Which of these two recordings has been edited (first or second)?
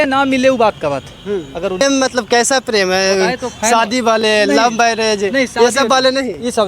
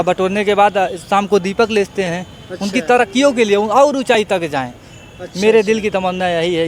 first